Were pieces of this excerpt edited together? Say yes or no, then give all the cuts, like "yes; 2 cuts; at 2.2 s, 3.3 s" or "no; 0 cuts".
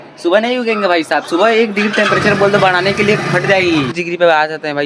yes; 1 cut; at 4.0 s